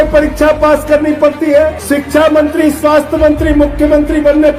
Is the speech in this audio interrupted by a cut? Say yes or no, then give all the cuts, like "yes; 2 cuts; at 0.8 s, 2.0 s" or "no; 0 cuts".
yes; 1 cut; at 1.8 s